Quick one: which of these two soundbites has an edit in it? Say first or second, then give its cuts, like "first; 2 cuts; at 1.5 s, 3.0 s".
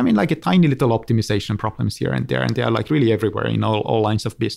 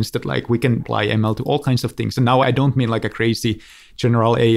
second; 1 cut; at 2.4 s